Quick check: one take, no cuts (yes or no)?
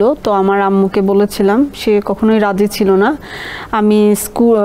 yes